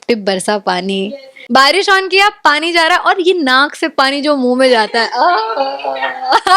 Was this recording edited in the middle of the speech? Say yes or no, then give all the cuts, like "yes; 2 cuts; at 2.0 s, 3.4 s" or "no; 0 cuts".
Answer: yes; 1 cut; at 1.3 s